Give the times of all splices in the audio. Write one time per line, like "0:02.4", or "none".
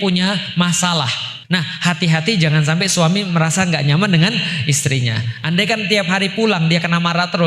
0:01.3